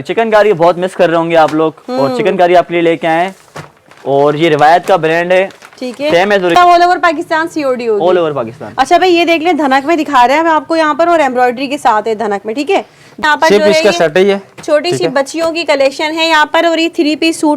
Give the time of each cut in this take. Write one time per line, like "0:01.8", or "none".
0:06.5
0:13.2